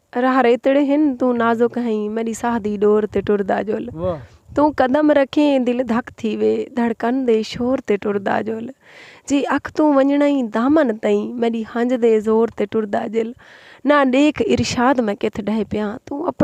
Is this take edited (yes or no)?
no